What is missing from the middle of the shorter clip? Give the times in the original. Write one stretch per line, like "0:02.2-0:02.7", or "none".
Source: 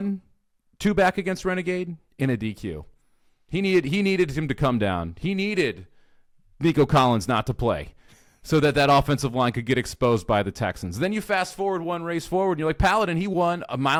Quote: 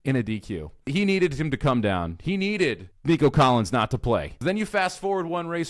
0:03.0-0:03.9
0:05.9-0:06.4
0:07.9-0:10.9